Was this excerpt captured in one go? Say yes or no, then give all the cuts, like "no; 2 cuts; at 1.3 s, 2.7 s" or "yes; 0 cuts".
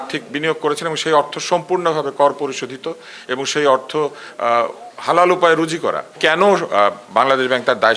no; 1 cut; at 6.2 s